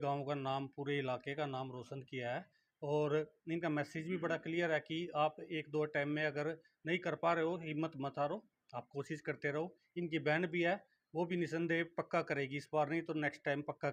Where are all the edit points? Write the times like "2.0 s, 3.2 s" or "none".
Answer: none